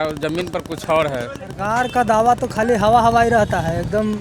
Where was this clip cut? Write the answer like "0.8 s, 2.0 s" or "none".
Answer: 1.6 s